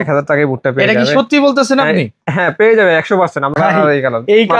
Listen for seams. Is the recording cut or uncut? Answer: cut